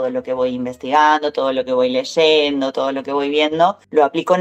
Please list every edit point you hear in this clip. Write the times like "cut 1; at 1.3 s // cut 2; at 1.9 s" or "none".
none